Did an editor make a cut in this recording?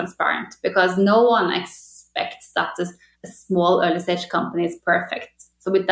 no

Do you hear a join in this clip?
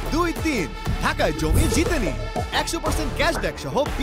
no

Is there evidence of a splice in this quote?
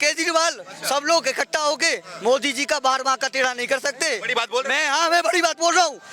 no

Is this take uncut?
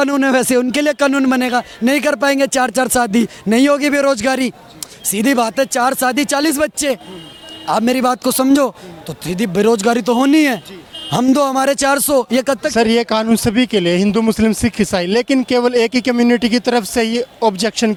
yes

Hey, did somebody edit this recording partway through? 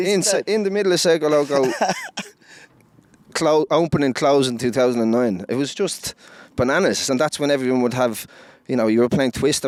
no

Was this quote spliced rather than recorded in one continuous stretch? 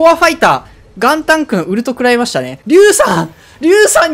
no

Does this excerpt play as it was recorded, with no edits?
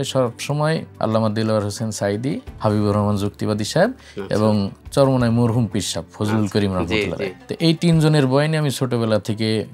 no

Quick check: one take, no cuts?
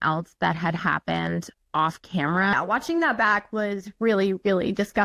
no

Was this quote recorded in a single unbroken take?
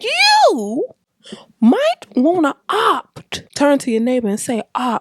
no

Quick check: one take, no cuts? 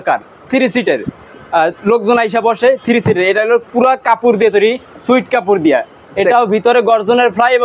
yes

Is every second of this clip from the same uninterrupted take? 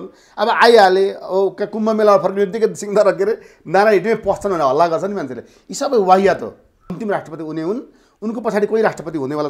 no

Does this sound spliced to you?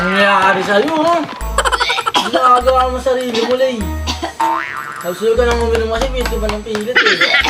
no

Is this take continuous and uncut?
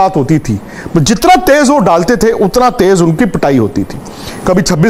yes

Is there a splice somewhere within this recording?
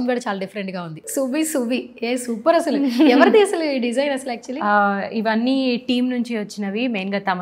yes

